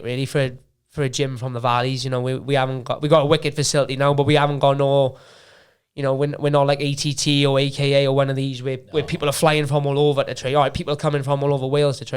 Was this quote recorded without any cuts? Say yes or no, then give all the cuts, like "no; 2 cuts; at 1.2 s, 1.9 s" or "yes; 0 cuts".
yes; 0 cuts